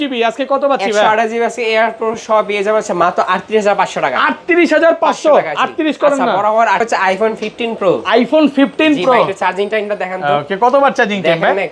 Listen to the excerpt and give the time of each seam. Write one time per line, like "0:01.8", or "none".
0:06.9